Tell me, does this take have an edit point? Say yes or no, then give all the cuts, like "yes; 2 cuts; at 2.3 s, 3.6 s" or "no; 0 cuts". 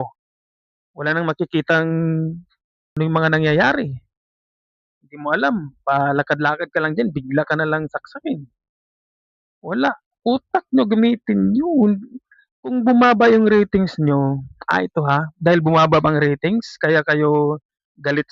yes; 1 cut; at 2.8 s